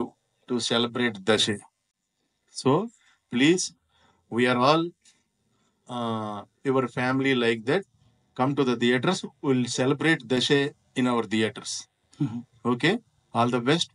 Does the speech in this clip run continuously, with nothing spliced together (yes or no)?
yes